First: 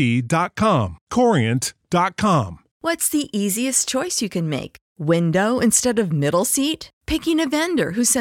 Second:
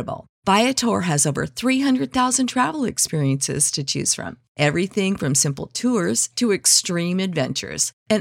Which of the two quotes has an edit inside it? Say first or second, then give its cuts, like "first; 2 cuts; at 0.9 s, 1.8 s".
first; 1 cut; at 2.6 s